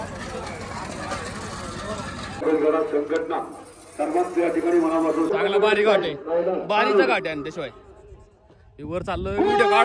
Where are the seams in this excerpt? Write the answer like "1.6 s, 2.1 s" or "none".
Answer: 5.3 s